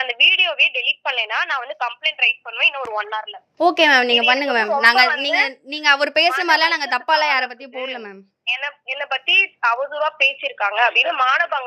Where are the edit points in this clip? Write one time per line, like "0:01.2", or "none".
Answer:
none